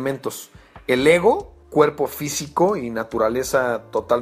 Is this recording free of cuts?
yes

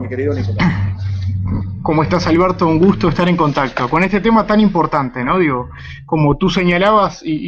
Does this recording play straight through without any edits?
yes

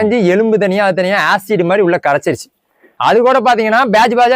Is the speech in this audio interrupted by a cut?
yes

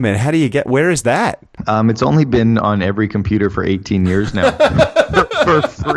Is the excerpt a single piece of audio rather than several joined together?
no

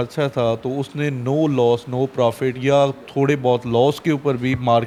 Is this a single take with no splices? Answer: yes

